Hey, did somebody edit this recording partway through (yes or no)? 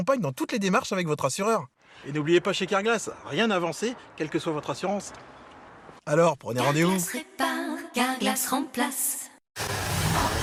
no